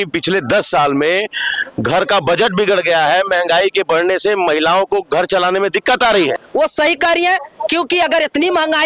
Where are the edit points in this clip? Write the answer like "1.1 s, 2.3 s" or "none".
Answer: 6.4 s